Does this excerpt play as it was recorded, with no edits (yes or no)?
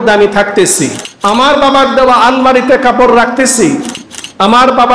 no